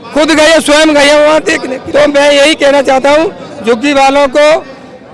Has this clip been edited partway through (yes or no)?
yes